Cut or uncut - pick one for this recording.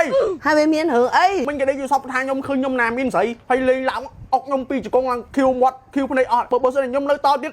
cut